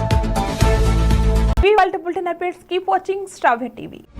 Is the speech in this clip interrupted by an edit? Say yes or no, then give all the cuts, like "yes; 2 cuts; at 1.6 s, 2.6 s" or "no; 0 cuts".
no; 0 cuts